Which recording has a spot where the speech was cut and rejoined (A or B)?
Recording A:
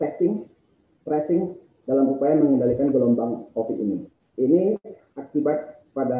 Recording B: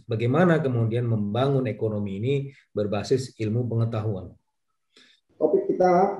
B